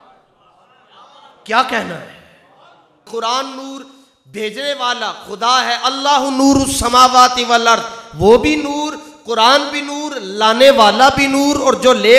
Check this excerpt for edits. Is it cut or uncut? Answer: cut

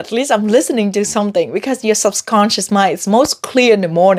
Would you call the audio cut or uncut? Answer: uncut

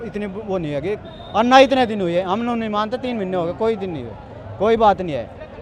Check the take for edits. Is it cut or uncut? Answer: uncut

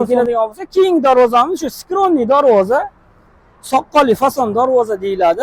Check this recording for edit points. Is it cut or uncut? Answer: uncut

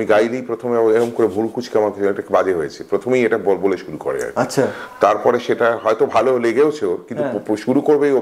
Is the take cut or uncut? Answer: uncut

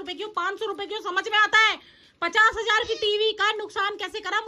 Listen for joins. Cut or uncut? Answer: uncut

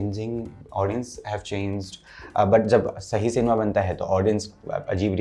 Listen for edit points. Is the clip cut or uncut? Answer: uncut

